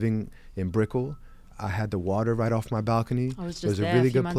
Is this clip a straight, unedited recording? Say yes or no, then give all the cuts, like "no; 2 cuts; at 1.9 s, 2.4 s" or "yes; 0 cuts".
yes; 0 cuts